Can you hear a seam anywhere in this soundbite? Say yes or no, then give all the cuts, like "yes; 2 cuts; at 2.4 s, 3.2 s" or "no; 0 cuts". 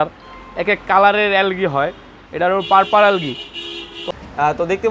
yes; 1 cut; at 4.0 s